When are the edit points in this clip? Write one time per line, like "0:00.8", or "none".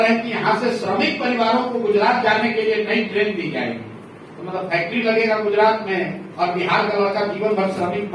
none